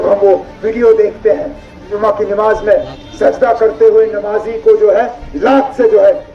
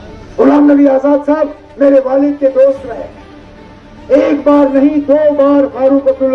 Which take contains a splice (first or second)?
first